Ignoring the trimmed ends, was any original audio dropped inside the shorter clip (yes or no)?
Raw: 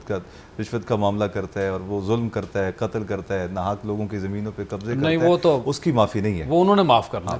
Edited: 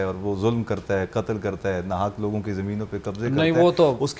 no